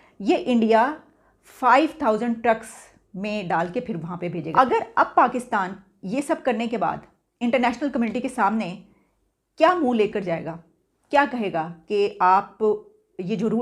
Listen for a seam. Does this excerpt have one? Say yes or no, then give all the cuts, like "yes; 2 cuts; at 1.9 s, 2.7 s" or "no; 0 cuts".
yes; 1 cut; at 4.5 s